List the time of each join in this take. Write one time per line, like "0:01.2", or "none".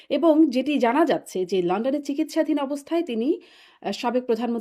none